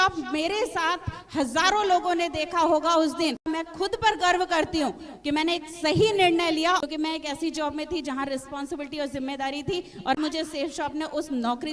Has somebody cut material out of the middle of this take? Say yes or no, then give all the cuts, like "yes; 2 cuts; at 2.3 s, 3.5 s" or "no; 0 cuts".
yes; 3 cuts; at 3.4 s, 6.8 s, 10.2 s